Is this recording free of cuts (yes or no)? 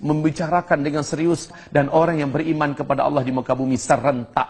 no